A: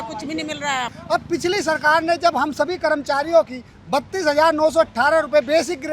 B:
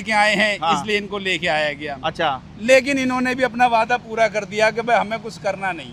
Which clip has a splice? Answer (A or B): A